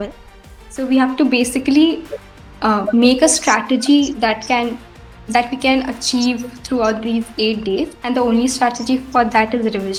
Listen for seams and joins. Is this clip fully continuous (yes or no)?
yes